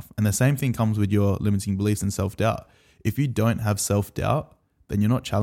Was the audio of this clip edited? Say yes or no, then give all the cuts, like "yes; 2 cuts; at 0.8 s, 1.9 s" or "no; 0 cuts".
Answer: no; 0 cuts